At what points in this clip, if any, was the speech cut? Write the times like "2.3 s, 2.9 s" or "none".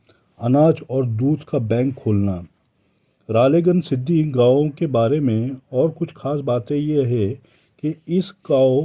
none